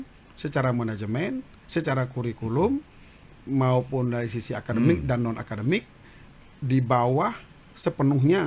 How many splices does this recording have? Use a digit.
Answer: 0